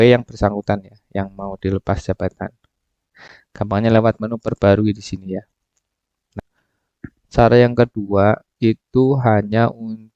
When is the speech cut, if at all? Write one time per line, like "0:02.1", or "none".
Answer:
0:06.3